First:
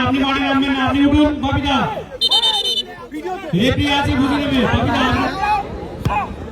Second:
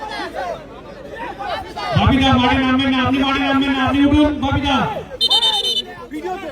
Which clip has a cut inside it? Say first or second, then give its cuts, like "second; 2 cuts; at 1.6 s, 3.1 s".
first; 1 cut; at 5.2 s